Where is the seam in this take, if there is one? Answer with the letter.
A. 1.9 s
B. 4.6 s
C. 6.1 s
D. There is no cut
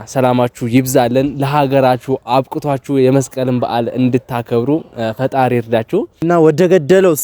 C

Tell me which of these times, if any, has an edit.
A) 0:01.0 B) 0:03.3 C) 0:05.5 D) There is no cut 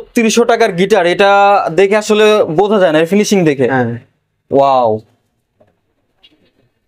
D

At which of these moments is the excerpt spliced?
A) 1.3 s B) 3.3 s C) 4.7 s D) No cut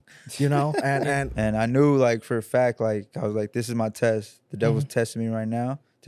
A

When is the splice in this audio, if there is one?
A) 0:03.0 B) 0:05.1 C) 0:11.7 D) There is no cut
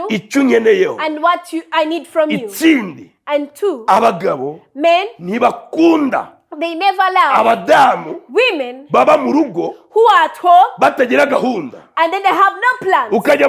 D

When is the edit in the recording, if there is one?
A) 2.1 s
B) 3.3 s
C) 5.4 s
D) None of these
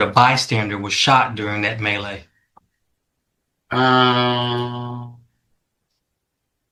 D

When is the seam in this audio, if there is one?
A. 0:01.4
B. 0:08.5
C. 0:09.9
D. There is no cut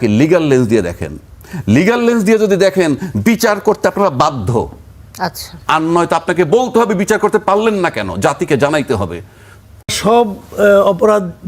C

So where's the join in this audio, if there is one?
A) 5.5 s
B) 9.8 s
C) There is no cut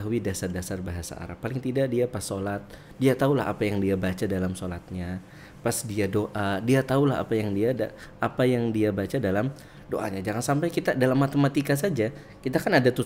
C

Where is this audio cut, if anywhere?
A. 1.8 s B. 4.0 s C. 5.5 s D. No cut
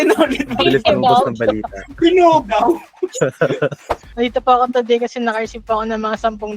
B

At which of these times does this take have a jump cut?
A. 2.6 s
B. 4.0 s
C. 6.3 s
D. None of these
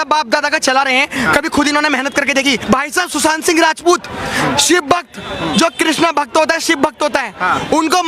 A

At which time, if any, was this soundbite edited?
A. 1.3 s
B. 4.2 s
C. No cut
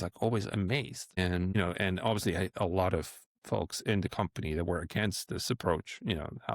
A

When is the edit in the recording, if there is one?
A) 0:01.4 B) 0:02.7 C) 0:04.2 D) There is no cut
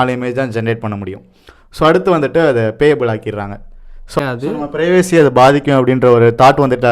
C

